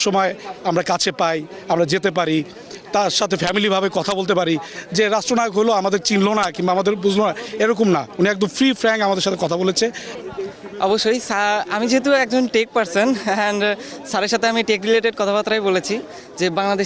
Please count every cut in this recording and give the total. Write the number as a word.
one